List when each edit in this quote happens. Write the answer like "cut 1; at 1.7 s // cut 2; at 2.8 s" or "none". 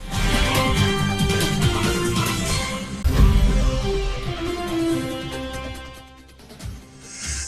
cut 1; at 2.9 s